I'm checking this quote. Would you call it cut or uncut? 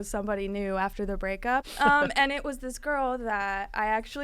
cut